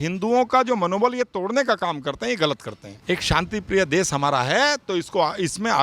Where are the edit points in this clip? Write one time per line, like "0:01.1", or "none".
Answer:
0:02.9